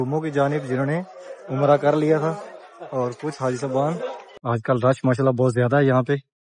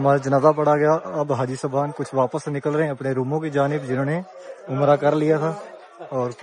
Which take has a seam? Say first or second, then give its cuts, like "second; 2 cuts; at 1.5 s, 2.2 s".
first; 1 cut; at 4.3 s